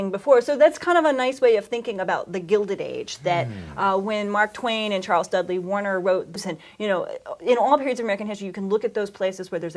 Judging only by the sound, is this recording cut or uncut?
uncut